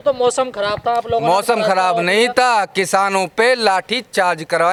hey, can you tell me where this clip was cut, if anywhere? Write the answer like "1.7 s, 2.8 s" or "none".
none